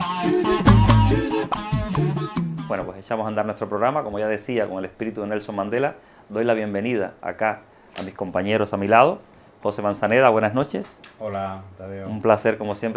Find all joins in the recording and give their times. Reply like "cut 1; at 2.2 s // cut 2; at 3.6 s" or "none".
none